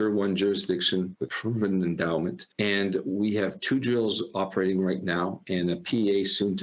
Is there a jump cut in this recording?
no; 0 cuts

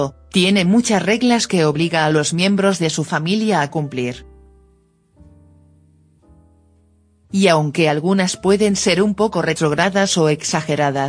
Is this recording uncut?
no; 1 cut; at 2.6 s

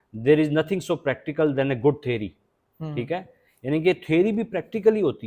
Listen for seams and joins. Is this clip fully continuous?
yes; 0 cuts

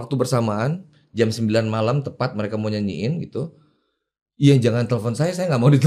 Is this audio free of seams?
yes; 0 cuts

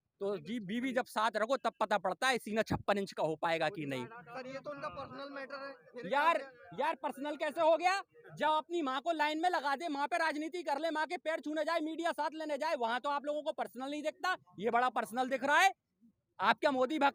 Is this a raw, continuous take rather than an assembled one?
yes; 0 cuts

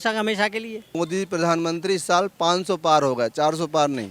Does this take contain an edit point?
yes; 1 cut; at 0.9 s

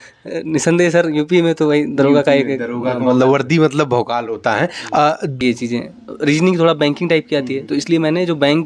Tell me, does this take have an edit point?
yes; 1 cut; at 5.3 s

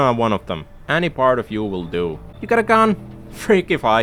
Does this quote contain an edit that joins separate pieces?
no; 0 cuts

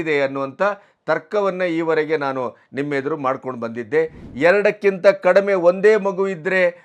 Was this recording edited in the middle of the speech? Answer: yes; 1 cut; at 4.2 s

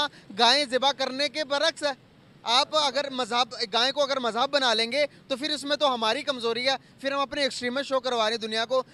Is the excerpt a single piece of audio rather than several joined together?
yes; 0 cuts

